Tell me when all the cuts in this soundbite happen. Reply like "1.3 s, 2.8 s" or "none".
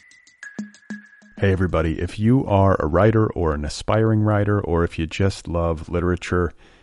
0.9 s

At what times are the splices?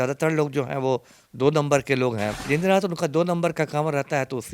2.4 s

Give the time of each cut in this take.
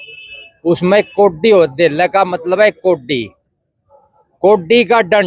none

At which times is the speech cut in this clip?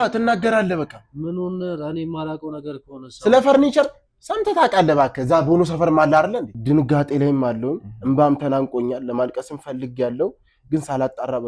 6.5 s

